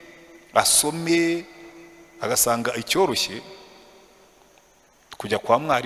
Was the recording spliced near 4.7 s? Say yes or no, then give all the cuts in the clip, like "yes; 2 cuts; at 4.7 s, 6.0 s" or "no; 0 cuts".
no; 0 cuts